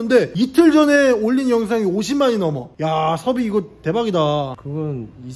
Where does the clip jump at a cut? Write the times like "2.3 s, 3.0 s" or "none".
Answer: none